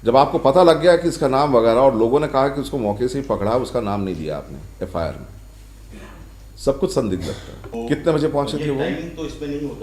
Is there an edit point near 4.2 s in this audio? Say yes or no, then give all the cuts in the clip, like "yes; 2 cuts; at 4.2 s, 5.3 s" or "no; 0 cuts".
no; 1 cut; at 7.7 s